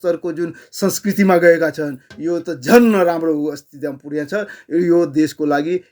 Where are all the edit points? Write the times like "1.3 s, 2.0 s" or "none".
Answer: none